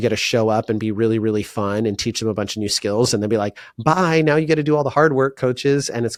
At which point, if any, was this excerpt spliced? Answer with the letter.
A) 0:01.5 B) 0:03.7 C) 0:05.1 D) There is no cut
D